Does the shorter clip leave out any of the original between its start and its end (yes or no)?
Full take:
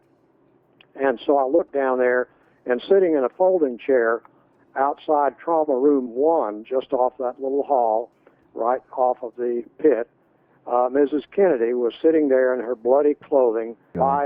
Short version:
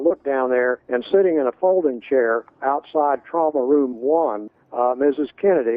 yes